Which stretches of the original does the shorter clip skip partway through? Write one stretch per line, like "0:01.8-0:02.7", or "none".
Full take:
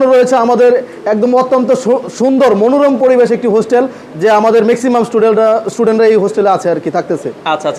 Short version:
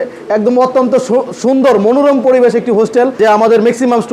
0:03.9-0:04.2